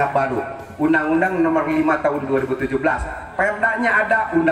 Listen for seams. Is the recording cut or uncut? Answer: uncut